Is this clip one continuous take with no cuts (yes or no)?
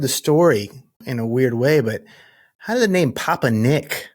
no